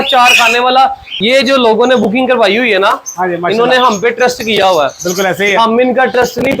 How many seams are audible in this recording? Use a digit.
1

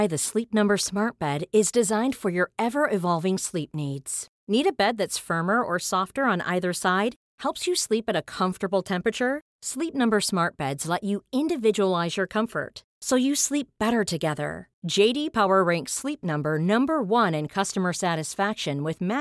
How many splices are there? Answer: 0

